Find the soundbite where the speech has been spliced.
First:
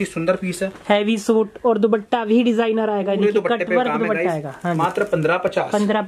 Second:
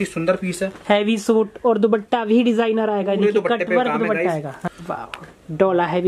second; 1 cut; at 4.6 s

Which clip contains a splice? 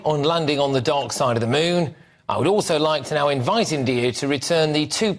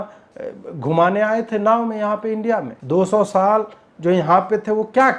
second; 1 cut; at 2.8 s

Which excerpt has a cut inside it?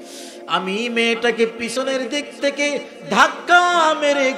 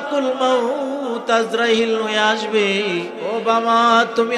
second; 1 cut; at 3.2 s

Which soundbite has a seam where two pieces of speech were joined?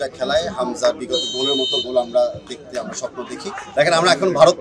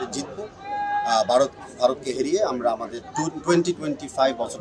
first; 1 cut; at 3.6 s

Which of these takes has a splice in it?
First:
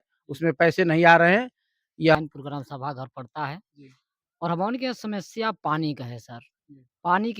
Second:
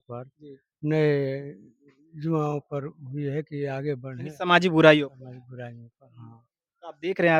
first; 1 cut; at 2.1 s

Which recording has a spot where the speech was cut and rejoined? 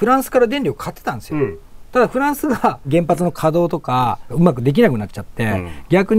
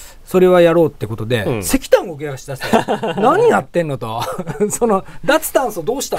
first; 2 cuts; at 2.8 s, 4.3 s

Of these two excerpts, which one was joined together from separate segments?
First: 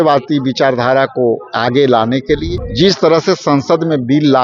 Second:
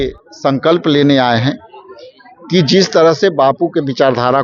first; 1 cut; at 2.6 s

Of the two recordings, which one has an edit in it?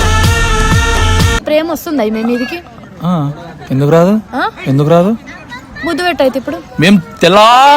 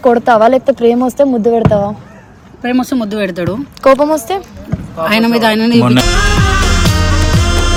first; 1 cut; at 1.3 s

